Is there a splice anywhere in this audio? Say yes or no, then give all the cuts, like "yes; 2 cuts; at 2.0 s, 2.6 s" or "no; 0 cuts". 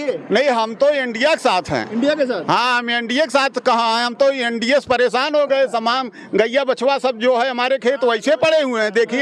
no; 0 cuts